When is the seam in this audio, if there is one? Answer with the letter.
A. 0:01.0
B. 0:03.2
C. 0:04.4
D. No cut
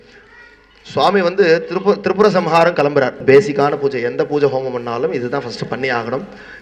B